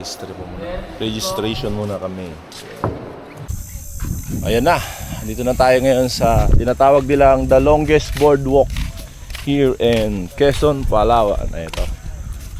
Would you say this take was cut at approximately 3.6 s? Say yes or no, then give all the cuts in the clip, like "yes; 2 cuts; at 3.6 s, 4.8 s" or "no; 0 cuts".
yes; 1 cut; at 3.6 s